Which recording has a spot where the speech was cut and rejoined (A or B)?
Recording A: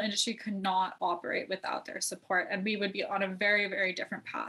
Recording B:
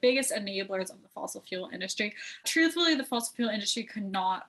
B